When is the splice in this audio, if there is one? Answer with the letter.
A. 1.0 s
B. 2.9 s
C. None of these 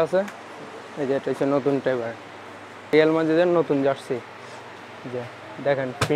B